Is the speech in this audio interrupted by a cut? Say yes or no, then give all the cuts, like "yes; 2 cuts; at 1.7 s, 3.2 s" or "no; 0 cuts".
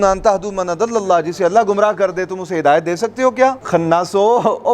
yes; 1 cut; at 3.6 s